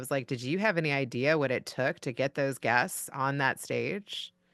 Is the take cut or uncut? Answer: uncut